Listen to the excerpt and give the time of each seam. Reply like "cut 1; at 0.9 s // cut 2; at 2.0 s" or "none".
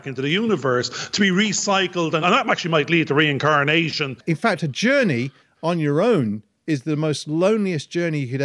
cut 1; at 2.2 s // cut 2; at 4.2 s